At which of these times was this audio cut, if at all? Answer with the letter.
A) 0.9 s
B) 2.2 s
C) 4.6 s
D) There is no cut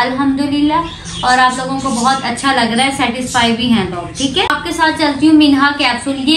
C